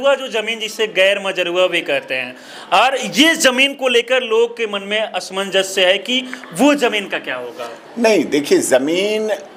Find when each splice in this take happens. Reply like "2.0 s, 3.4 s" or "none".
none